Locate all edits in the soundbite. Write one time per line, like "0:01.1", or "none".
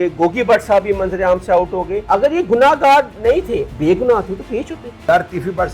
0:02.0
0:03.7
0:04.9